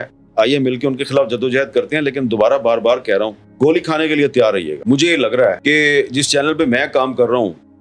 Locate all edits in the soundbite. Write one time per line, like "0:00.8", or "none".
none